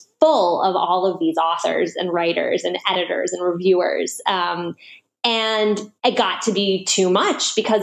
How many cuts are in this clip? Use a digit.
1